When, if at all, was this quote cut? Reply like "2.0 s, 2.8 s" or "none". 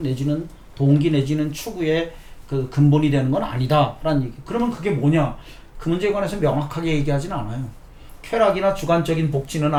none